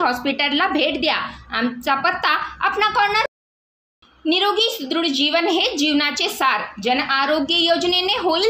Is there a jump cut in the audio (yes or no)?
yes